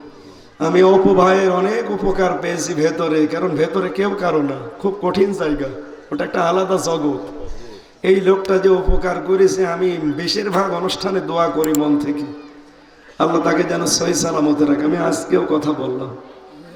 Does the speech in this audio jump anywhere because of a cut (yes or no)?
no